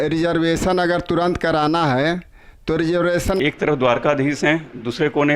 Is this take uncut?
no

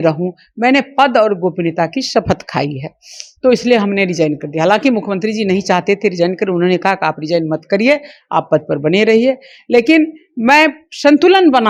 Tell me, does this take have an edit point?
no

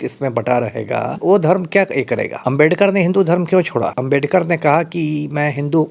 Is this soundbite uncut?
no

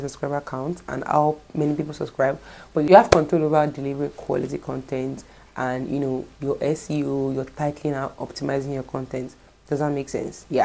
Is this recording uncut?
yes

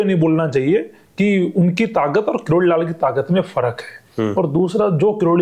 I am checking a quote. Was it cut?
no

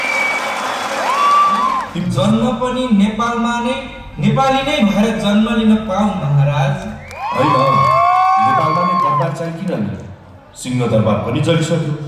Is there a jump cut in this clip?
yes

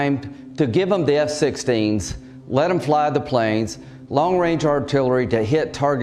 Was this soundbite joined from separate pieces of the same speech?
no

